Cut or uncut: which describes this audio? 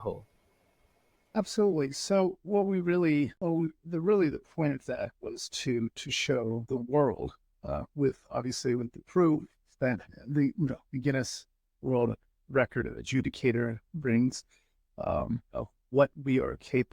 cut